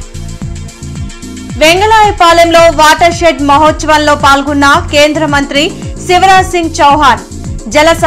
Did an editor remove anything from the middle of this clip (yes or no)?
no